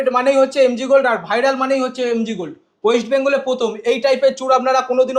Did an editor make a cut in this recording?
no; 0 cuts

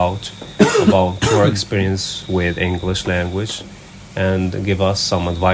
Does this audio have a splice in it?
no; 0 cuts

